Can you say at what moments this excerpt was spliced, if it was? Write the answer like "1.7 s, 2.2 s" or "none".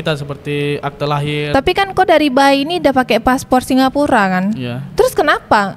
1.5 s